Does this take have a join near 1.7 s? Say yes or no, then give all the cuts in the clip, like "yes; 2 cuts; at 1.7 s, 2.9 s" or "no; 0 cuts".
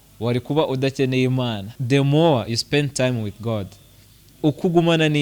yes; 1 cut; at 1.7 s